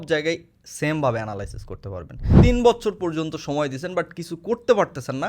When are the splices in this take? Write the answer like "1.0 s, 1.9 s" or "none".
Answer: 2.4 s